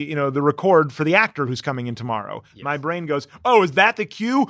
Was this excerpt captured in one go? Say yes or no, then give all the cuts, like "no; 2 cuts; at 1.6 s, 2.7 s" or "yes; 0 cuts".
yes; 0 cuts